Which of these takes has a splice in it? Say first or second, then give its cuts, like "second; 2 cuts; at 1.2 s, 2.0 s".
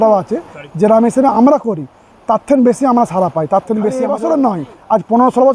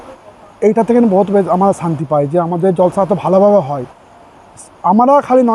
first; 1 cut; at 4.0 s